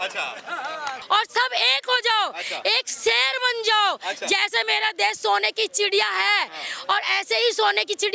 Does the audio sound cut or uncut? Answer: cut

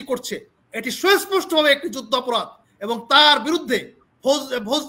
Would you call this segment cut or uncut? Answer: uncut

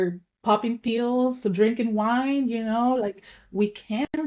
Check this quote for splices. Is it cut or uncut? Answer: uncut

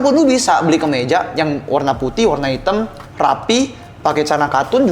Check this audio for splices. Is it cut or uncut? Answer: uncut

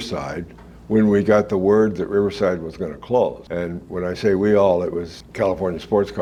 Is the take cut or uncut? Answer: uncut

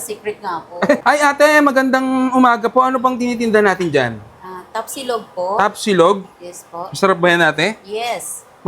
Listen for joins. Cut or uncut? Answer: cut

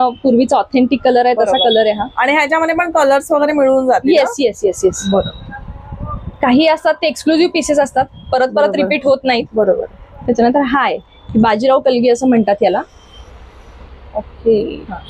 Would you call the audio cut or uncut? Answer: uncut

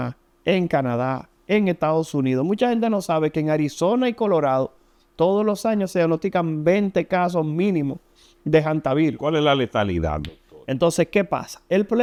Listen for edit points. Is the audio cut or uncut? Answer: uncut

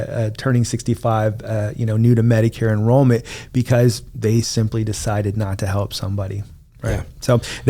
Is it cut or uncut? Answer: uncut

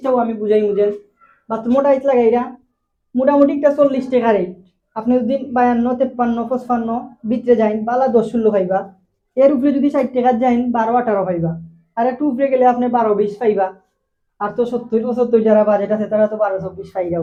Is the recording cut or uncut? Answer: uncut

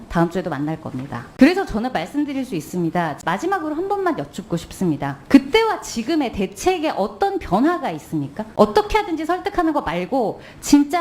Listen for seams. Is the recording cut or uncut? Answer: cut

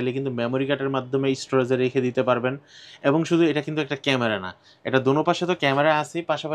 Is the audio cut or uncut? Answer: uncut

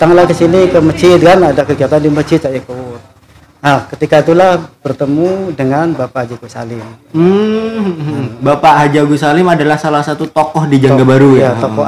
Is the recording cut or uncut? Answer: uncut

